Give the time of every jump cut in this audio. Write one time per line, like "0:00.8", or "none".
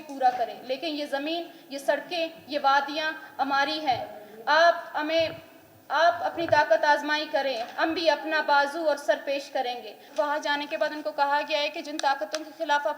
0:10.0